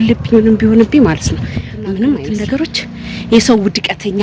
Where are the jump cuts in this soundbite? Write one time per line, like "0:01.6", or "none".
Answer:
0:02.3